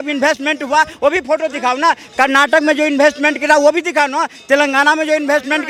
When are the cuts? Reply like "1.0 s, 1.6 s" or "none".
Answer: none